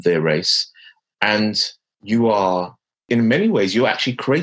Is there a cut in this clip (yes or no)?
yes